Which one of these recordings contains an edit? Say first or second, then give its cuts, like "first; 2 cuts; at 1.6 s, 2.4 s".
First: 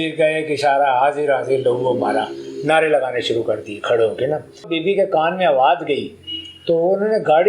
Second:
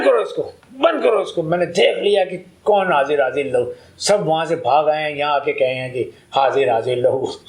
first; 1 cut; at 4.7 s